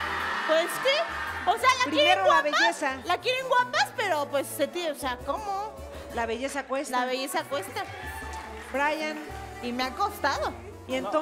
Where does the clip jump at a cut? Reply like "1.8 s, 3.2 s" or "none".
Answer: 2.0 s